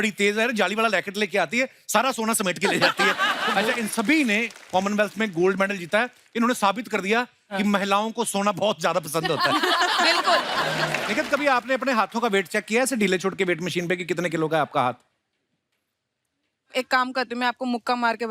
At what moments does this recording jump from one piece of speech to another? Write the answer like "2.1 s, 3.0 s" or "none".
3.5 s, 11.0 s